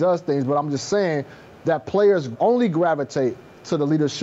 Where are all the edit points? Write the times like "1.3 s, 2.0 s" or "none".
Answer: 2.3 s

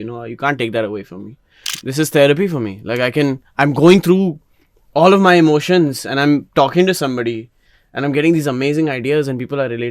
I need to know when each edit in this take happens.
1.8 s

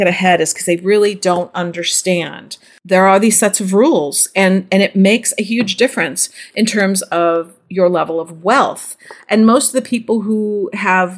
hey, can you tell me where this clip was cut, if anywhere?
none

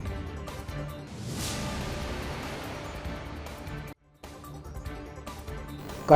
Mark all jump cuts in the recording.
none

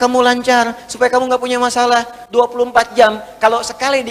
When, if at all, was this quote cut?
none

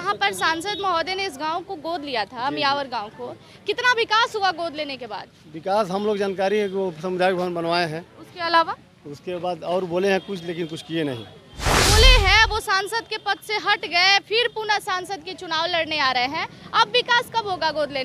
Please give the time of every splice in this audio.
11.8 s

